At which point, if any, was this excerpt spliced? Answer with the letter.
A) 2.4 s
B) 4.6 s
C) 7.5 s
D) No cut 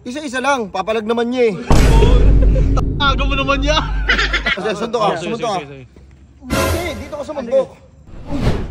B